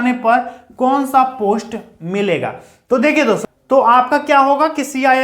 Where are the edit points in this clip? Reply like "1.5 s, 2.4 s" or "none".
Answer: 3.5 s